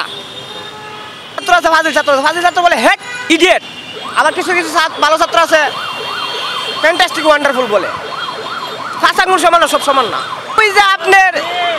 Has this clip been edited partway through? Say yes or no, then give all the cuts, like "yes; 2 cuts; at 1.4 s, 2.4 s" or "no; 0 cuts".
yes; 3 cuts; at 1.4 s, 3.1 s, 10.6 s